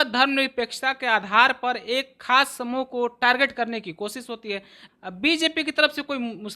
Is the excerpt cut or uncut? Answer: cut